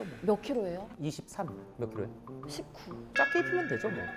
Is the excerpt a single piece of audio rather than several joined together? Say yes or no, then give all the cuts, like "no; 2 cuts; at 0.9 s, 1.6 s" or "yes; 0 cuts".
no; 1 cut; at 1.6 s